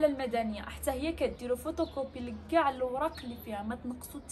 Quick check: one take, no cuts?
yes; 0 cuts

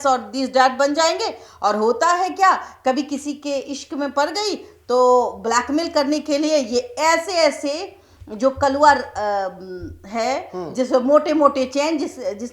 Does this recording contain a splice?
no; 0 cuts

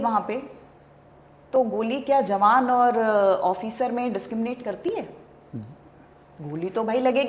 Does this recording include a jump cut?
no; 0 cuts

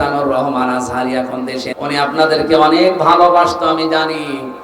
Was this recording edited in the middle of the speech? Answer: yes; 1 cut; at 1.7 s

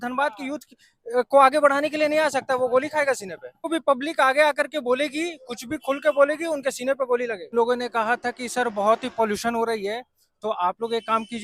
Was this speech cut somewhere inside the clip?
yes; 2 cuts; at 3.7 s, 7.5 s

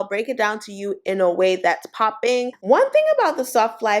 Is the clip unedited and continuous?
no; 1 cut; at 2.5 s

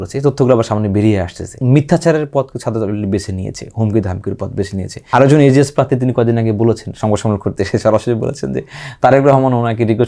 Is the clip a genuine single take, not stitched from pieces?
no; 2 cuts; at 1.6 s, 5.0 s

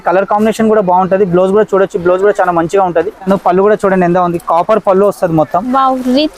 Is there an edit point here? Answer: yes; 1 cut; at 3.3 s

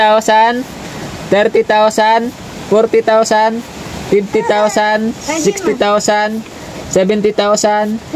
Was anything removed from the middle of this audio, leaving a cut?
no; 0 cuts

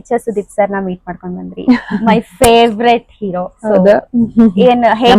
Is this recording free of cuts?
yes; 0 cuts

